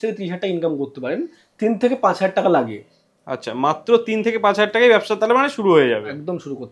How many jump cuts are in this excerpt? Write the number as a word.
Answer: zero